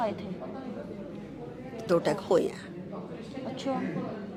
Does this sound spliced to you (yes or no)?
no